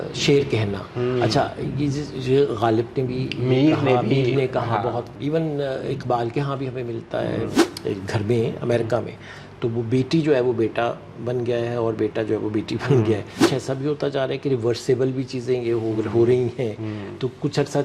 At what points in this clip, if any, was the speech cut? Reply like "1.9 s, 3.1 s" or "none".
5.1 s, 7.6 s, 13.5 s